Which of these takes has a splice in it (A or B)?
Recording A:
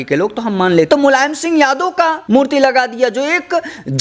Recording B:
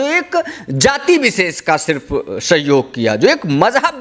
A